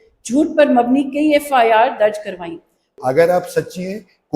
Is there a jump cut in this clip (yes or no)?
yes